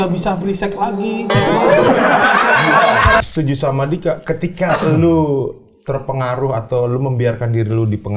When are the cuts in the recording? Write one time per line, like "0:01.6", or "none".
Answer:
0:03.2